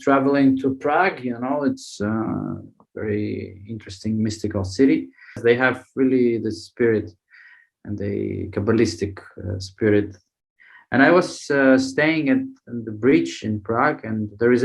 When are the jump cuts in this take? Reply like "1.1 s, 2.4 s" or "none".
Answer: 5.4 s